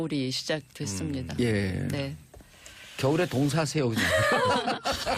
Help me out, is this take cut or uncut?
cut